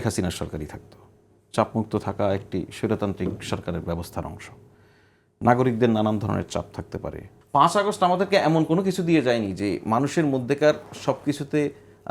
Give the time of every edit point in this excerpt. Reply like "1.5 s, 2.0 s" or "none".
7.3 s